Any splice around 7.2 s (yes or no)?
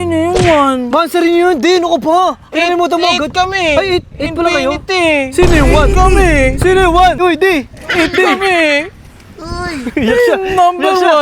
yes